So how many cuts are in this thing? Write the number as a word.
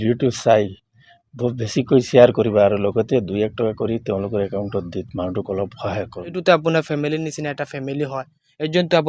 one